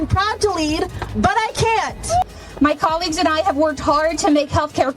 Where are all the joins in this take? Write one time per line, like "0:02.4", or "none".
0:02.2